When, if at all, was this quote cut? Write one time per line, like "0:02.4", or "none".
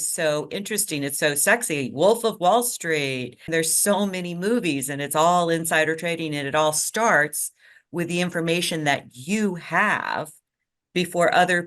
0:03.4